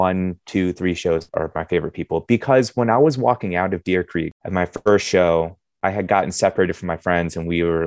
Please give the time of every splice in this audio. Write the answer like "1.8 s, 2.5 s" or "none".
1.3 s, 4.4 s